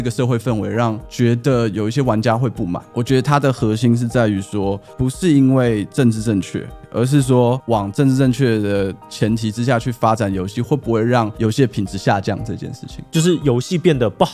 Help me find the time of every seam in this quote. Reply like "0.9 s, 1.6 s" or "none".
none